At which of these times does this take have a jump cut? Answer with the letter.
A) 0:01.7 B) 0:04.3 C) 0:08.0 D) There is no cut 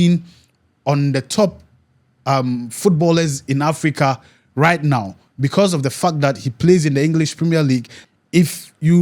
C